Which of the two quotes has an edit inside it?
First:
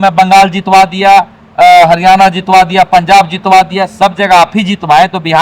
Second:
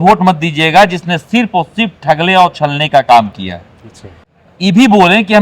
second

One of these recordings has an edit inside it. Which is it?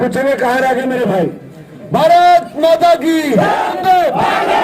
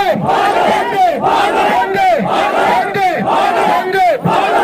first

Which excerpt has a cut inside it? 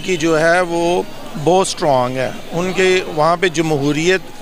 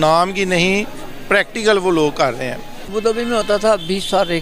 second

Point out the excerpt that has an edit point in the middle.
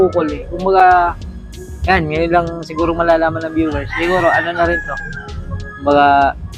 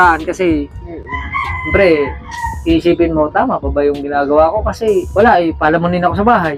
second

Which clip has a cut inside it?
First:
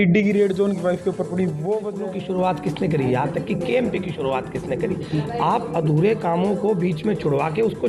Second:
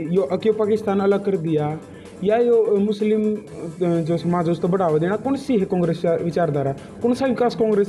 first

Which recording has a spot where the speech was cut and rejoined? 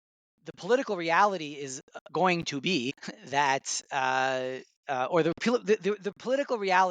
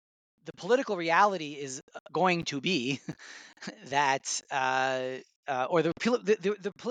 first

